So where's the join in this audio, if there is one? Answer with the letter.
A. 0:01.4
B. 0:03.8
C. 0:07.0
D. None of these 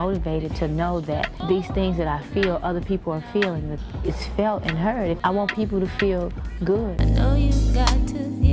C